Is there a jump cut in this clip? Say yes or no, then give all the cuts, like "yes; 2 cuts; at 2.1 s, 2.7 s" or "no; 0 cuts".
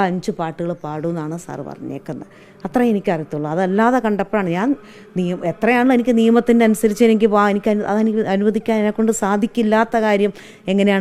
no; 0 cuts